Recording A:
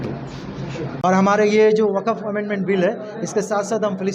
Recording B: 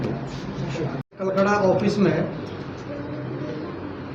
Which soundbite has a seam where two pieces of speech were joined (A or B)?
A